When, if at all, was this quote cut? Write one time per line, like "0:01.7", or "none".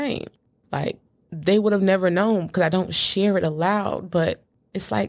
none

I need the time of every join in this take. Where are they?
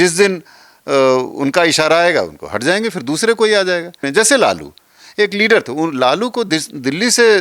0:04.0

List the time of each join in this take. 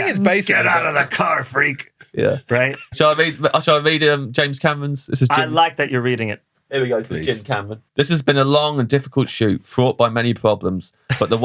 none

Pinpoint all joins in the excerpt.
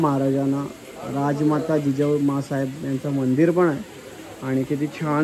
none

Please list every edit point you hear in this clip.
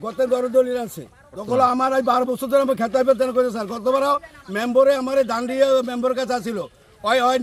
0:01.3

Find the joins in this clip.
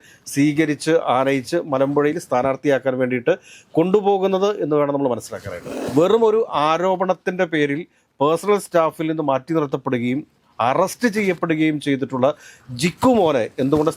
0:05.7

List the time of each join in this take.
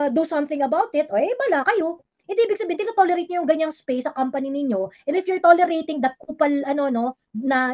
none

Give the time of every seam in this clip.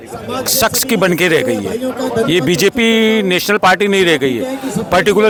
none

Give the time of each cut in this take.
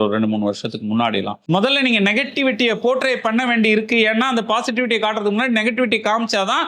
0:01.4

